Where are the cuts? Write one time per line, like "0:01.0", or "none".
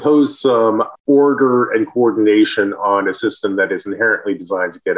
none